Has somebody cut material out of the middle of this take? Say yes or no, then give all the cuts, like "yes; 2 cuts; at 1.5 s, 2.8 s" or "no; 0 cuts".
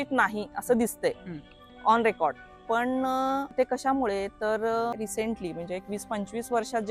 yes; 2 cuts; at 3.5 s, 5.0 s